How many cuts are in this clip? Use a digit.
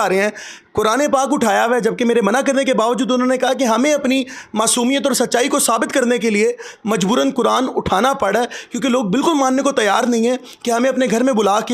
0